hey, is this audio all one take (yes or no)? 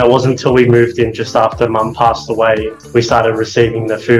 no